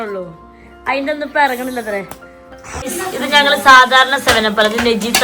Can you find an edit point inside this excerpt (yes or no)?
yes